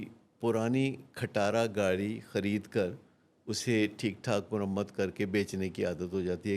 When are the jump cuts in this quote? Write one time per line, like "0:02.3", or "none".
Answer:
none